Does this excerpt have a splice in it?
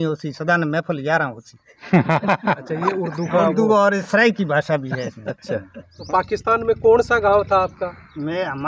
yes; 1 cut; at 5.9 s

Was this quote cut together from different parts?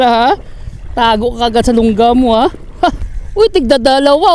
yes; 1 cut; at 3.1 s

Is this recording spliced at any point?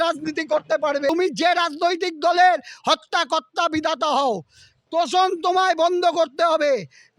yes; 1 cut; at 1.1 s

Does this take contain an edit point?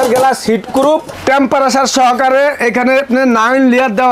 yes; 1 cut; at 1.1 s

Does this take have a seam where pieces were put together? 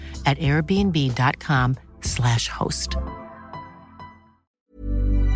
yes; 1 cut; at 4.4 s

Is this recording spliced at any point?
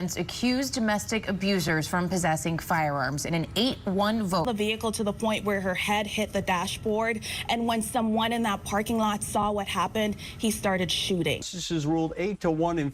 yes; 2 cuts; at 4.5 s, 11.4 s

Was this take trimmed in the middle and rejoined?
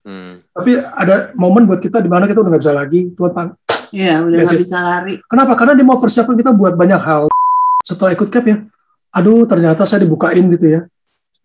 yes; 1 cut; at 7.8 s

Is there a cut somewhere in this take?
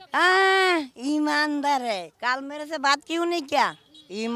yes; 1 cut; at 2.1 s

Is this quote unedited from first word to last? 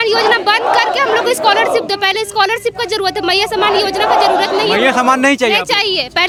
yes; 0 cuts

